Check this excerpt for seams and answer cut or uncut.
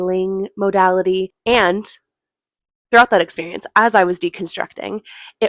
cut